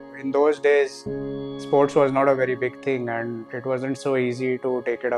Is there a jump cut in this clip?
no; 0 cuts

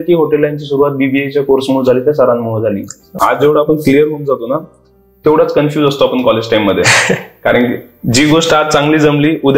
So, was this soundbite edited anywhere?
yes; 1 cut; at 3.1 s

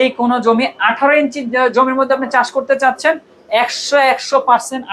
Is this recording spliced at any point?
no; 0 cuts

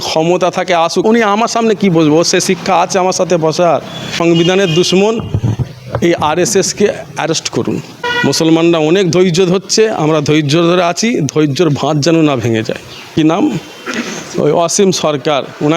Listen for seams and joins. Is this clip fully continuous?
no; 4 cuts; at 1.0 s, 4.1 s, 8.0 s, 13.0 s

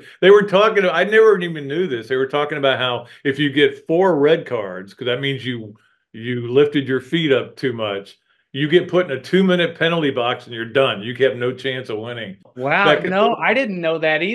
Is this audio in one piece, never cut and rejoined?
no; 1 cut; at 12.4 s

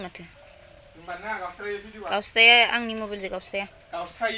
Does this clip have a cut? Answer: no; 0 cuts

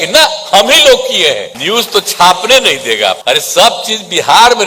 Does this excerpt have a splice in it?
yes; 2 cuts; at 1.5 s, 3.2 s

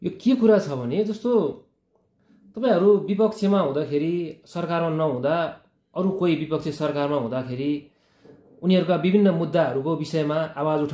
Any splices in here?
no; 0 cuts

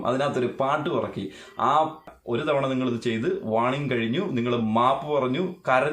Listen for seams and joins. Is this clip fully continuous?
no; 1 cut; at 2.1 s

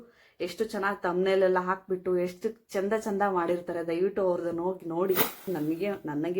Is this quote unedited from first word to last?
no; 1 cut; at 5.5 s

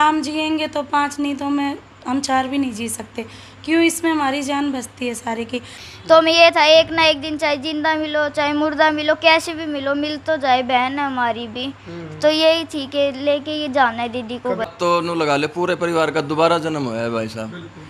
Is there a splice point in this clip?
yes; 2 cuts; at 5.8 s, 14.7 s

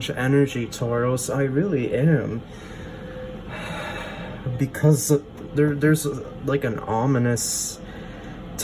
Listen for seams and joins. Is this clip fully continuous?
yes; 0 cuts

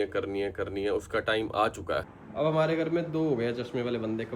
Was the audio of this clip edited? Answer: yes; 1 cut; at 2.2 s

